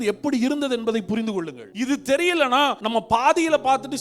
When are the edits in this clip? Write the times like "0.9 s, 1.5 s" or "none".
1.6 s, 2.8 s